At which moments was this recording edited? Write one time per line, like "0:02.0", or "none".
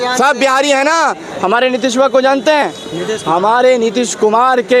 none